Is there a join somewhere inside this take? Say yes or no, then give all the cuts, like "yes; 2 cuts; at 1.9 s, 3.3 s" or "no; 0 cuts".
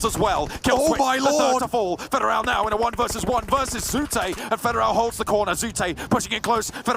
no; 0 cuts